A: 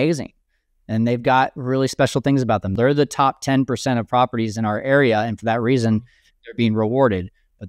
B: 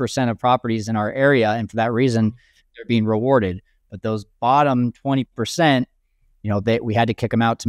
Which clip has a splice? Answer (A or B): A